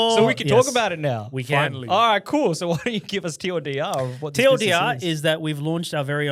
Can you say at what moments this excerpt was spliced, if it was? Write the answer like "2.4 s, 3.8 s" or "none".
none